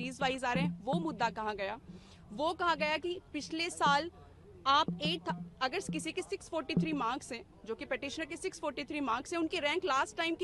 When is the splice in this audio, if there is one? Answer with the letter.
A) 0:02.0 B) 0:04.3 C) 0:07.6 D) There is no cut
D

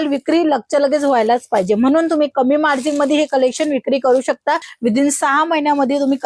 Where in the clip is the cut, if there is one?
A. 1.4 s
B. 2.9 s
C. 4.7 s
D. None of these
C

